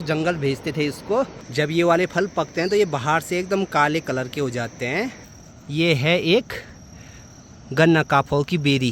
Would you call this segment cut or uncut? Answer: cut